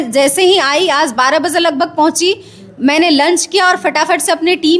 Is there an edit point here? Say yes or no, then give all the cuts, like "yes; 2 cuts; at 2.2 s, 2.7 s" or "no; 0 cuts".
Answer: no; 0 cuts